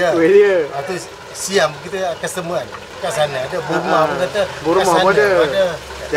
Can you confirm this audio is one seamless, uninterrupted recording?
no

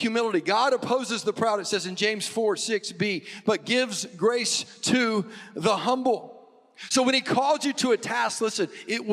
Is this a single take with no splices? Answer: yes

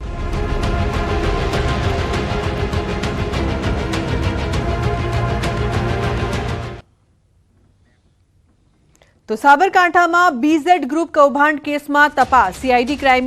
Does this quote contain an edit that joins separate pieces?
no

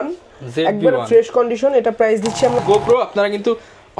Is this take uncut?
no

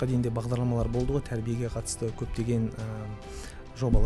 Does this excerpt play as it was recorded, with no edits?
yes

